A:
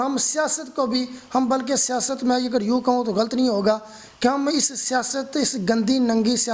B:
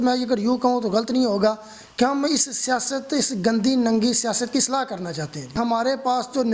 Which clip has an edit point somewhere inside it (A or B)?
B